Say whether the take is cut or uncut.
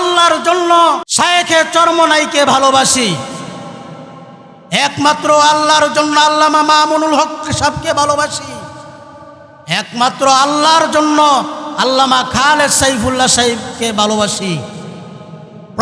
cut